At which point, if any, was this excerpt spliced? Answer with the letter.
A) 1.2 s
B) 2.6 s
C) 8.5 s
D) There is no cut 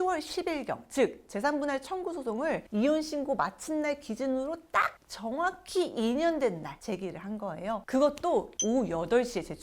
C